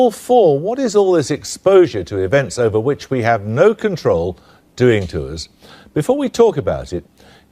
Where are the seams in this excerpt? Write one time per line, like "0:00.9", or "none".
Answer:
0:01.5